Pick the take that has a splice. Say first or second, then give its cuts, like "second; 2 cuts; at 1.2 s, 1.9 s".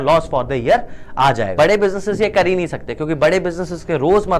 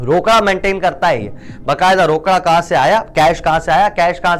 first; 1 cut; at 1.5 s